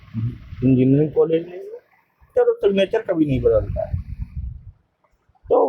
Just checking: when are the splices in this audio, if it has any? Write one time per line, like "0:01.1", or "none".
0:02.3